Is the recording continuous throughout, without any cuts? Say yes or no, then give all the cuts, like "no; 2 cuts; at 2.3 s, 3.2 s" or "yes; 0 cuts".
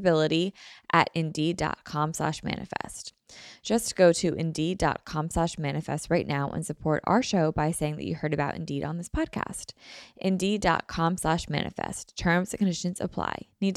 yes; 0 cuts